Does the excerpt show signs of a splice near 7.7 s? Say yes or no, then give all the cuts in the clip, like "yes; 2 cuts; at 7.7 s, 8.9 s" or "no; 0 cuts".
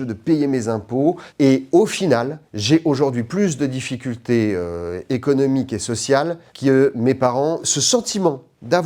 yes; 1 cut; at 7.7 s